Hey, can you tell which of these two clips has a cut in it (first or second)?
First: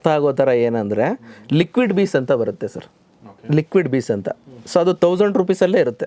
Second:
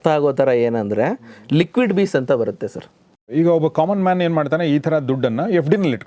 second